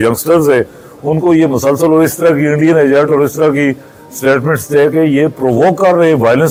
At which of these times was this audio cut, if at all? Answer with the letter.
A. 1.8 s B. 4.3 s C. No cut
C